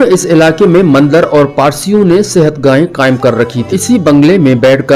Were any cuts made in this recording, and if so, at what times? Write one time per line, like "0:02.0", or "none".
0:03.7